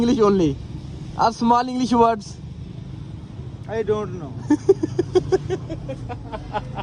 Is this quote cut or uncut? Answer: uncut